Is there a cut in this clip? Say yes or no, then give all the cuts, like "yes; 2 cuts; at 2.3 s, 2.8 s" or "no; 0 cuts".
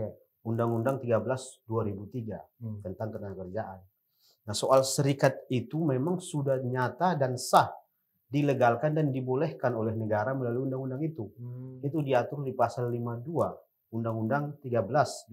no; 0 cuts